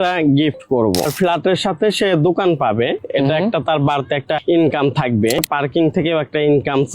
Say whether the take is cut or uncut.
cut